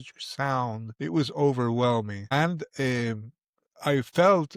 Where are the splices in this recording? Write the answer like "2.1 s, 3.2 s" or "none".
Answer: 0.9 s, 2.2 s